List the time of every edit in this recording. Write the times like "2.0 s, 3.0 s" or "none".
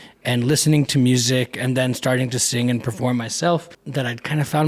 3.8 s